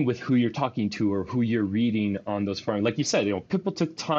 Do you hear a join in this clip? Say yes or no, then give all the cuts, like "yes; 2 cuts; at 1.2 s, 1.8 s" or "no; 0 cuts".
no; 0 cuts